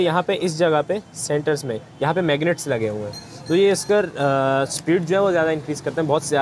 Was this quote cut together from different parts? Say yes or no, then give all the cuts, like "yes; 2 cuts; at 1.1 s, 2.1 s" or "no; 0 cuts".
no; 0 cuts